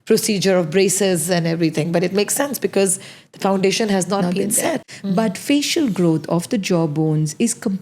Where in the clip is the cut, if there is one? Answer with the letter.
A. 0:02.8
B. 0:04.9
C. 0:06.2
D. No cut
B